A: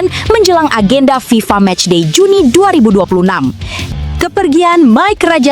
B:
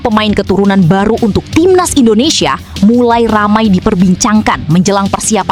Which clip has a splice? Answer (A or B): A